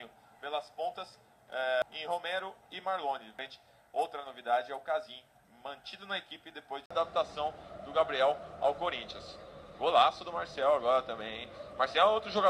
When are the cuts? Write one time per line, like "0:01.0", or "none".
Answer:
0:01.8
0:03.3
0:06.9